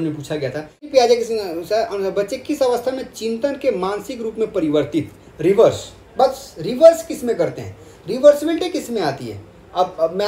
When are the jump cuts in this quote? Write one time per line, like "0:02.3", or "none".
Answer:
0:00.9